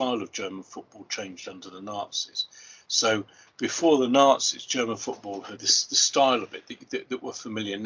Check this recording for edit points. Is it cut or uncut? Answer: cut